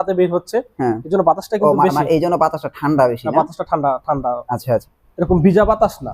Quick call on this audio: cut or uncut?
cut